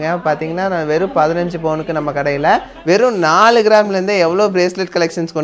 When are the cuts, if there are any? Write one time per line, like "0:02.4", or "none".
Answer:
0:02.7